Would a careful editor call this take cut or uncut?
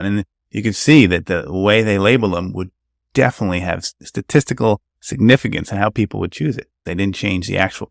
cut